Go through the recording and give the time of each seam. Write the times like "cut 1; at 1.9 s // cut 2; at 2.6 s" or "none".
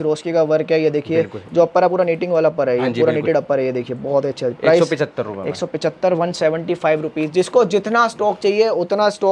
none